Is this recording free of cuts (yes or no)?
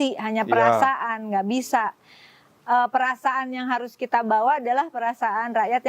yes